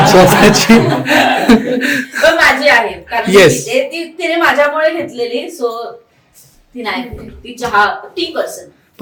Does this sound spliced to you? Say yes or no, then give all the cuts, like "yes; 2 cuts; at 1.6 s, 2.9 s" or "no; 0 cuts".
no; 0 cuts